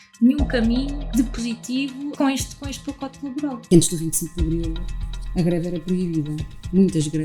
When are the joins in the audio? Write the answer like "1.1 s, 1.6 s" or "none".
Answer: 1.1 s, 2.1 s, 3.6 s